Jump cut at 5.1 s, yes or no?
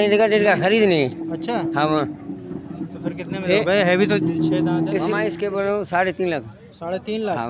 yes